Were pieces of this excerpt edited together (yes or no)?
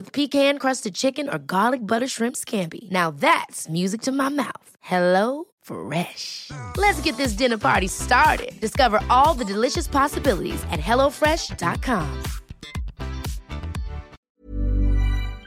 yes